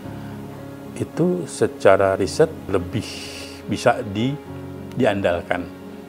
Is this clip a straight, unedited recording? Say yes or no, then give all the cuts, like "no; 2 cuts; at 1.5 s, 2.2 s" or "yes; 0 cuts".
no; 1 cut; at 2.7 s